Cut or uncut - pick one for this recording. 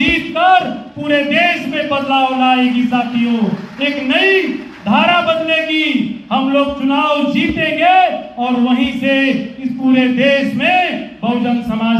uncut